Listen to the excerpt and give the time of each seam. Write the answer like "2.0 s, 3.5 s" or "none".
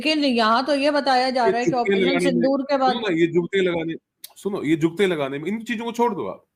none